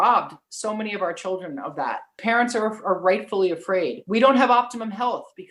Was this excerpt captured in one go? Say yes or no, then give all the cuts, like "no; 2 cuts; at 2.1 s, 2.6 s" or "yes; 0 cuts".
no; 2 cuts; at 2.2 s, 4.0 s